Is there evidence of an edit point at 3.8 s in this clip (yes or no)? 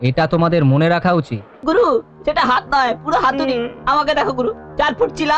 no